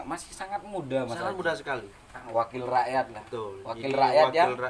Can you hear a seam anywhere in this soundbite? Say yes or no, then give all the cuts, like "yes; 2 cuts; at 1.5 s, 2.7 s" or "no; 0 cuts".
yes; 1 cut; at 2.2 s